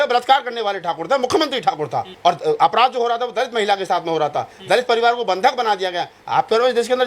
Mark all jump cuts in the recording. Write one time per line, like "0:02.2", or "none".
0:02.1